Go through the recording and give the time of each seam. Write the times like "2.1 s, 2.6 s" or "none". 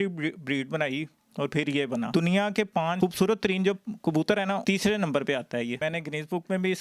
2.1 s, 5.7 s